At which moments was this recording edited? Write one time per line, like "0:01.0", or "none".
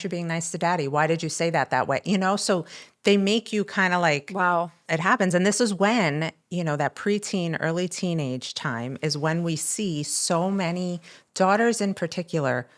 0:04.8